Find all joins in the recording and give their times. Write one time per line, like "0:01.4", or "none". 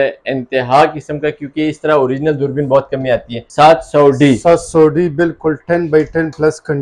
0:03.4